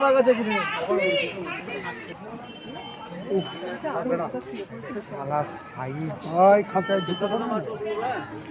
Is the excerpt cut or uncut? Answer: cut